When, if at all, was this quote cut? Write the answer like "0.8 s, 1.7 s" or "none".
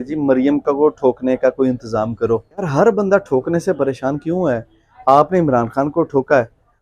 2.7 s